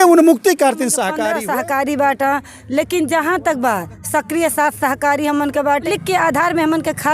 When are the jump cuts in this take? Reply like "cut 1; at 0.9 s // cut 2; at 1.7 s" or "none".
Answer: cut 1; at 1.1 s // cut 2; at 5.9 s